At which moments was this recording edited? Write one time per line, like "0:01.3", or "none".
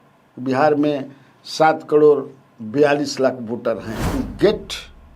0:03.9